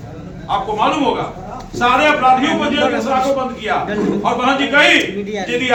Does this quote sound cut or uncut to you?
uncut